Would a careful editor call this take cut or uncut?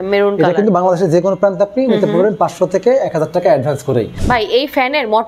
cut